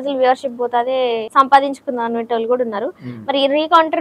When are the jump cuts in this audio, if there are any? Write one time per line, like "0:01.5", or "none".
0:01.2